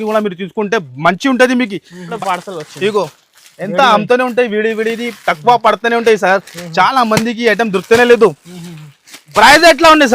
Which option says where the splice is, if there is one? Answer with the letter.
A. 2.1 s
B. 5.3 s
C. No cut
A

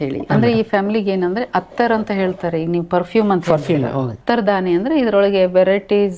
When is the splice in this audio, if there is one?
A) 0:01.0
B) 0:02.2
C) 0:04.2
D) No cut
C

